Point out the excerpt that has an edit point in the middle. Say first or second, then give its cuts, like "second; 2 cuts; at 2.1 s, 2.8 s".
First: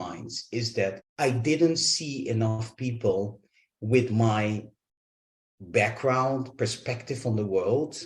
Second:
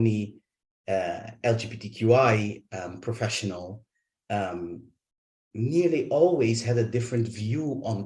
first; 1 cut; at 1.0 s